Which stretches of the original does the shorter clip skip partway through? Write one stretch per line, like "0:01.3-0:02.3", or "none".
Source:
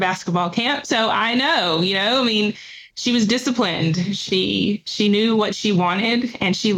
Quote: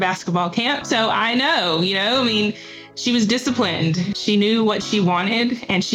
0:04.2-0:04.9